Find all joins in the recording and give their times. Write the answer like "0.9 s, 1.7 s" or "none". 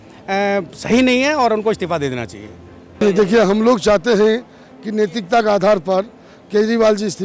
none

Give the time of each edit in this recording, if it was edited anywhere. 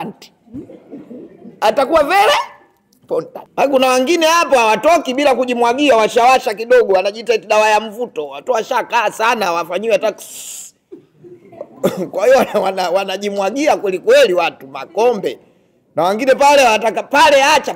3.4 s

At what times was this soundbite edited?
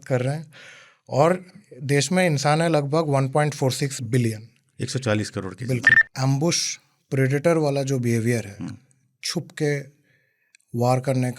6.0 s

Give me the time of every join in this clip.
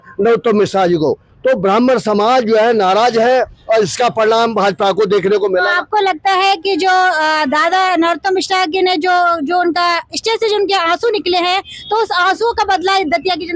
none

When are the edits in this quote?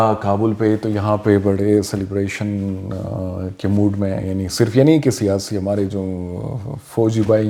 none

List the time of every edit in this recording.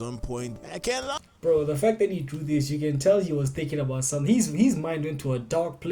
1.2 s

